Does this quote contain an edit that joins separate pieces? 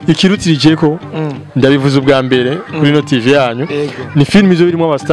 no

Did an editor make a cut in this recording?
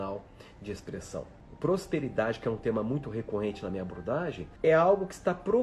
yes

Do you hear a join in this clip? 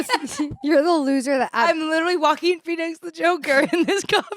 no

